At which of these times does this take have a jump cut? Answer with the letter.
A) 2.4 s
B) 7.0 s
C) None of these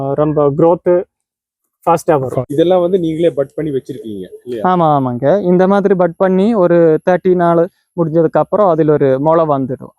A